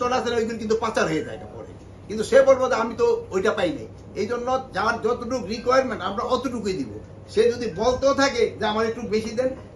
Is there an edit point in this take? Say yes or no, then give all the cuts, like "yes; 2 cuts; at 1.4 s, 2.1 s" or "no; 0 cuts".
no; 0 cuts